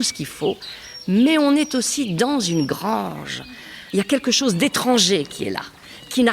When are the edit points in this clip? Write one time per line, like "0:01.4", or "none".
0:03.5